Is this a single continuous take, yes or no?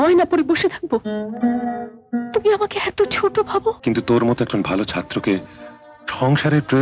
no